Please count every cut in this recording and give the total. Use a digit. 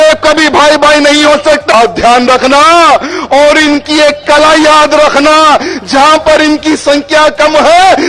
1